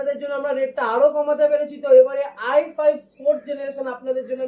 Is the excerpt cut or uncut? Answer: uncut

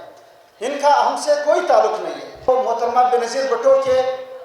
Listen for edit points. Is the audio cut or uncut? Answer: cut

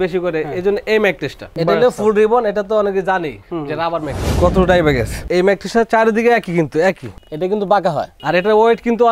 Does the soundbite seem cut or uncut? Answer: cut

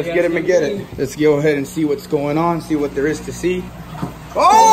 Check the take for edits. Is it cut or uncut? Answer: cut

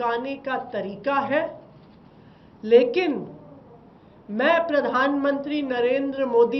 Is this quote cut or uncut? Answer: uncut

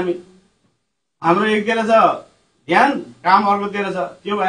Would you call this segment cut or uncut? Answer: uncut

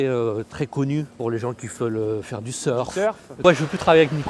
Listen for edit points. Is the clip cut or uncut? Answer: cut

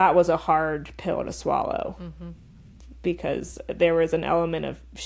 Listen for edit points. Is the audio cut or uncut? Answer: uncut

